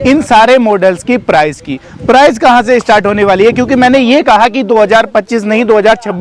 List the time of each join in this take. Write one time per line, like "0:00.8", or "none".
none